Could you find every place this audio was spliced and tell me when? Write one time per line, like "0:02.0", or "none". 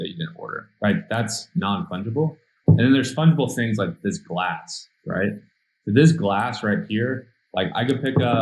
none